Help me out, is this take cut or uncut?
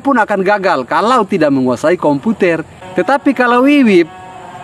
cut